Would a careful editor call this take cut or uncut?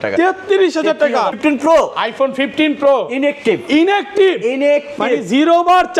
cut